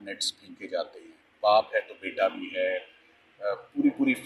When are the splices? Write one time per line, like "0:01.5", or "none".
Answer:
none